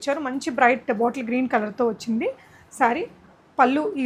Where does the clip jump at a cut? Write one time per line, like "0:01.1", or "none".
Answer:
none